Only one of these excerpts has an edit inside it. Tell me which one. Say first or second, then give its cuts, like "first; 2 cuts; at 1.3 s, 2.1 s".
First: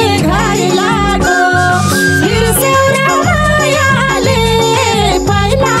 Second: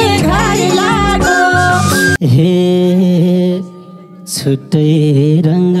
second; 1 cut; at 2.2 s